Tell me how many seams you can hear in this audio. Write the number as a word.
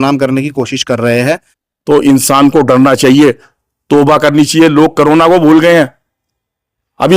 one